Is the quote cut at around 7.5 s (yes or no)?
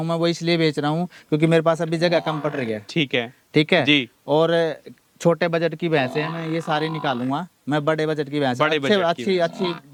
no